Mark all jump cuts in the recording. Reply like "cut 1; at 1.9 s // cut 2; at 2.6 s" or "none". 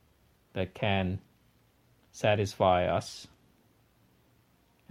cut 1; at 1.0 s